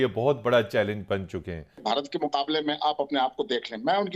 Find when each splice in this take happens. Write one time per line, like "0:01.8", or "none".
0:01.7